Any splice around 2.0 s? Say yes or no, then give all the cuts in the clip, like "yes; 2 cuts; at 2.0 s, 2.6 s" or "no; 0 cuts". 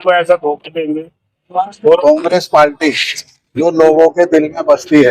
yes; 1 cut; at 2.0 s